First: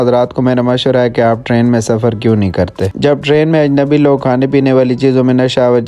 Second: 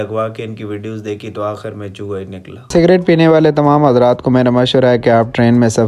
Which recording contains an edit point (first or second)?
second